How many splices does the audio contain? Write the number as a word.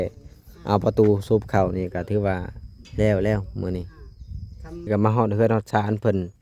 one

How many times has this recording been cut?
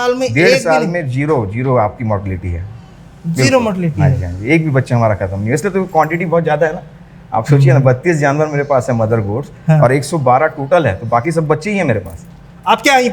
zero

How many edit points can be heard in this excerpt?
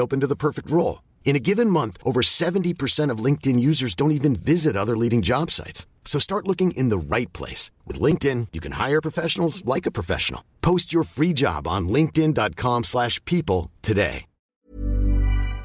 one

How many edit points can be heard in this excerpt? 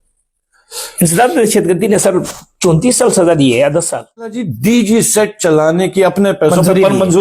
one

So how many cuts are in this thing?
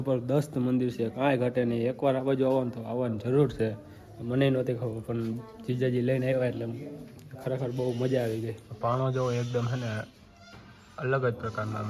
zero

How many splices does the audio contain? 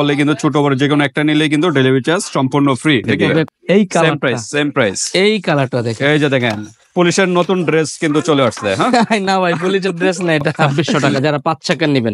two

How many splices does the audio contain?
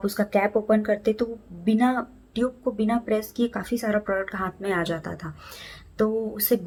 zero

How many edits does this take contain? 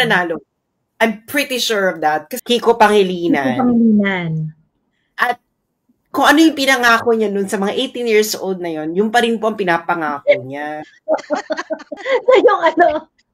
two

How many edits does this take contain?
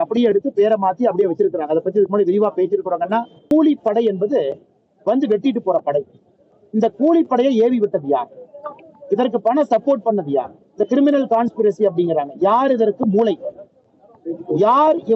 one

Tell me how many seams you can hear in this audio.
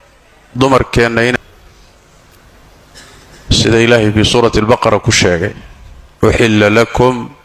one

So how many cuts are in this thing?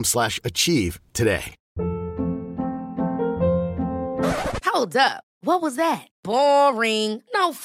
one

